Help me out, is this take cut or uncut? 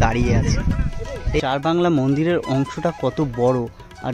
cut